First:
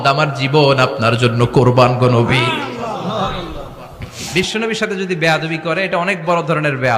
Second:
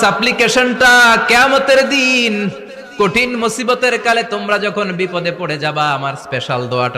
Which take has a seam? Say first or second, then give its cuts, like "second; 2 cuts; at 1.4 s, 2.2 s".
first; 1 cut; at 4.2 s